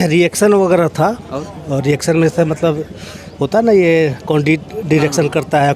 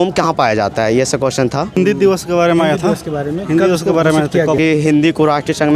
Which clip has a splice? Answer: second; 2 cuts; at 1.8 s, 4.6 s

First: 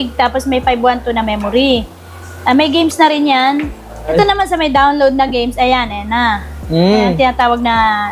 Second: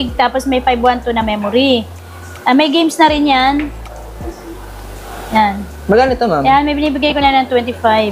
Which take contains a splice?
first; 1 cut; at 4.1 s

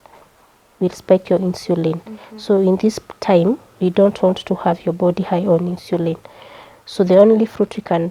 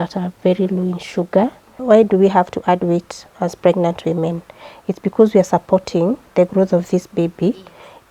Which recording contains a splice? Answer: second; 1 cut; at 1.8 s

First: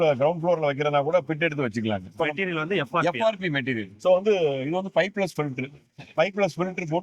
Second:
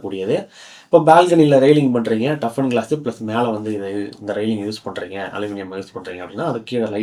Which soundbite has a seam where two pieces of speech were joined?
first; 2 cuts; at 2.2 s, 3.9 s

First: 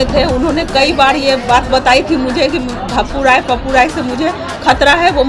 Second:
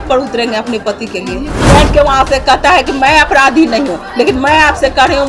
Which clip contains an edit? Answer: second; 1 cut; at 1.5 s

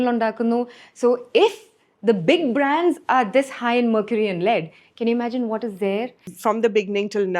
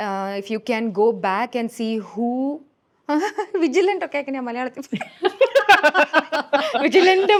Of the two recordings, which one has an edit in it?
first; 1 cut; at 6.2 s

